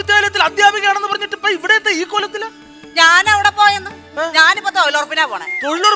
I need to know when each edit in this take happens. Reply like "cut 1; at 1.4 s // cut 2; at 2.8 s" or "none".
none